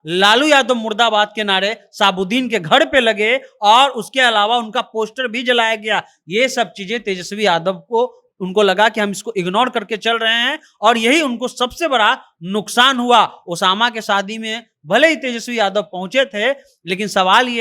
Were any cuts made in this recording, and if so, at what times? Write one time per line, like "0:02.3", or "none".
none